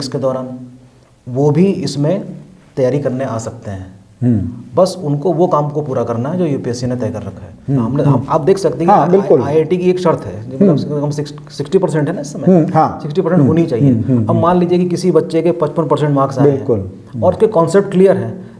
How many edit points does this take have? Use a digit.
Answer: 1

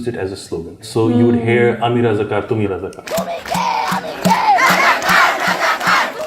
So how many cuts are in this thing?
2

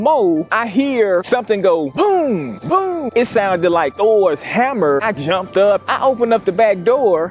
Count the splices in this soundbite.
3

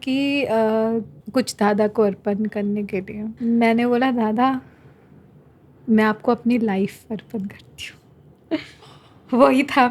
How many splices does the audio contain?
2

